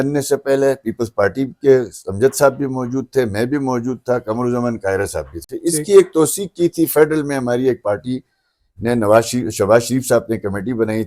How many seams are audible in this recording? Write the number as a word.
zero